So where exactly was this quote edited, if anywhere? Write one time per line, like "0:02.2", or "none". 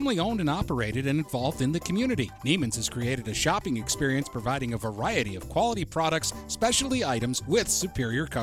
none